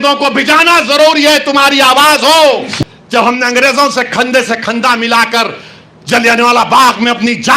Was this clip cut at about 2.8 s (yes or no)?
yes